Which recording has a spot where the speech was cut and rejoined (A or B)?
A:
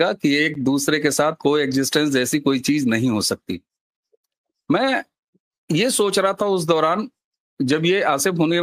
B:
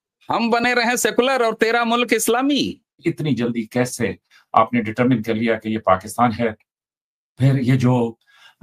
B